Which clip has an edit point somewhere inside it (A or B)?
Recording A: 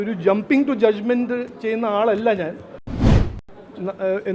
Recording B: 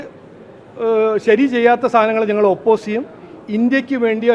A